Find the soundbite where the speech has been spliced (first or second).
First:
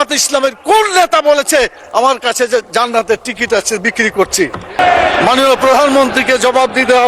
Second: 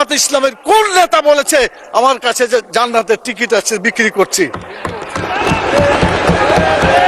first